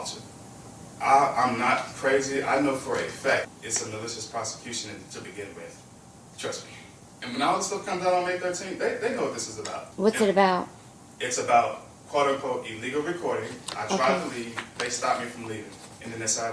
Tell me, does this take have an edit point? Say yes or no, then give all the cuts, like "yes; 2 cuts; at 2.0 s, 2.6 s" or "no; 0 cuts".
yes; 2 cuts; at 3.5 s, 9.8 s